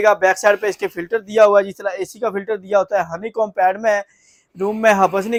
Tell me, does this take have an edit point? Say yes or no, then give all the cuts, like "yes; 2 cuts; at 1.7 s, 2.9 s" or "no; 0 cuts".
no; 0 cuts